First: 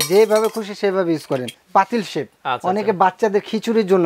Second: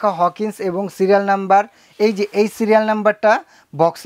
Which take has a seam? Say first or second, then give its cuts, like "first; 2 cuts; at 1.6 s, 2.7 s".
first; 1 cut; at 1.5 s